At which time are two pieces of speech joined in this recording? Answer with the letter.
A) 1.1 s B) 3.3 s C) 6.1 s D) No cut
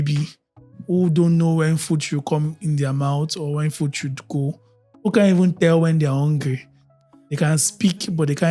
D